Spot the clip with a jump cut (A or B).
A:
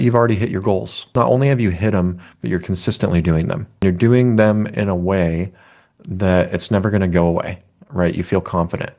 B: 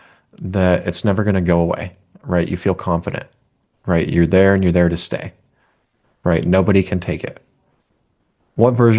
A